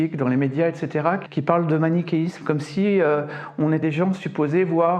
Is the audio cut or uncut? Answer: cut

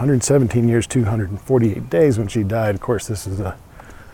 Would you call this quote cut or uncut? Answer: uncut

